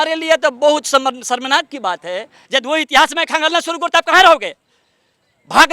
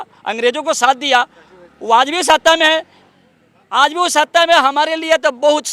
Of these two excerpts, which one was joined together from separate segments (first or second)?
first